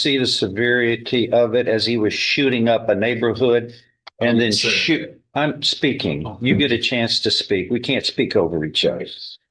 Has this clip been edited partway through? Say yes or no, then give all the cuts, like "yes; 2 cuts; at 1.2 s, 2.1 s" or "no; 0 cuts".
no; 0 cuts